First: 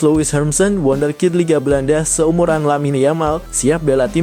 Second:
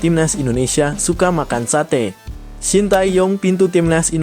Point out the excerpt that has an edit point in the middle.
second; 1 cut; at 2.4 s

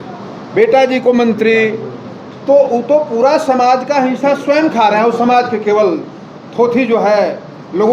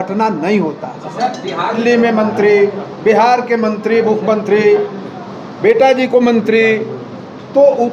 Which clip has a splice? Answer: second; 1 cut; at 1.8 s

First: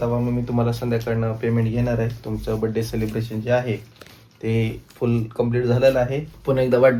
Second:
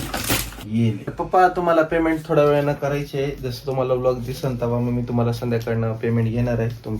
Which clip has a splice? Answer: second; 1 cut; at 1.1 s

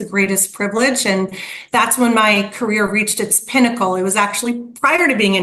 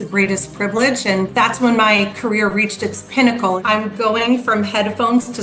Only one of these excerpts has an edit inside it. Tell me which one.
second; 2 cuts; at 1.3 s, 3.6 s

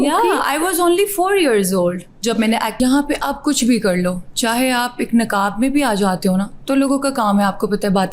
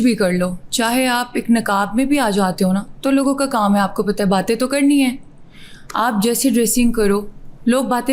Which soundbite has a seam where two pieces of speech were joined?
first; 1 cut; at 2.7 s

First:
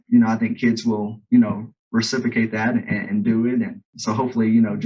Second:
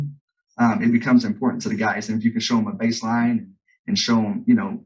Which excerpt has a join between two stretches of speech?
first; 1 cut; at 3.9 s

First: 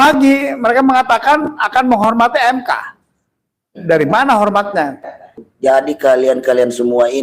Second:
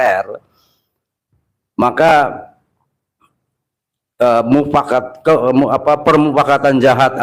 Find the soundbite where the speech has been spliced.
first; 1 cut; at 5.4 s

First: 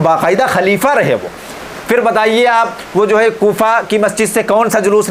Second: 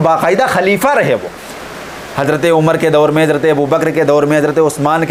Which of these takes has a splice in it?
first; 1 cut; at 1.7 s

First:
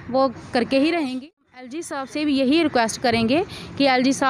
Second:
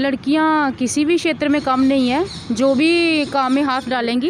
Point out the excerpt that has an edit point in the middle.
first; 1 cut; at 1.9 s

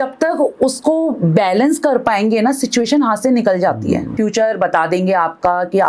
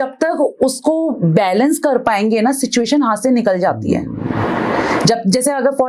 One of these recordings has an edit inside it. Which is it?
first; 1 cut; at 4.1 s

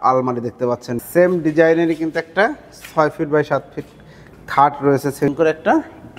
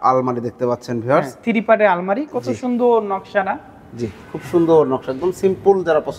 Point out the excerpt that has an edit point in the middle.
first; 2 cuts; at 1.0 s, 5.3 s

